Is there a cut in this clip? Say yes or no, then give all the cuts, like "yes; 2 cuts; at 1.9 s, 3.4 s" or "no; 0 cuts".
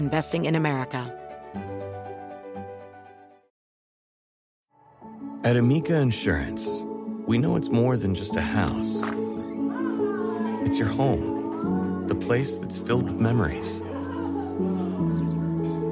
yes; 1 cut; at 1.1 s